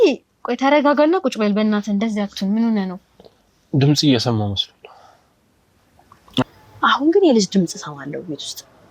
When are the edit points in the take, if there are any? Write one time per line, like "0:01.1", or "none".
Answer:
0:06.5